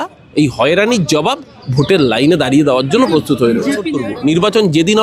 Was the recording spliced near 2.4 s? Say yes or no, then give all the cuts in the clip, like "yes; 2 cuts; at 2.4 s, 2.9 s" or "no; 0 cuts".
no; 1 cut; at 3.9 s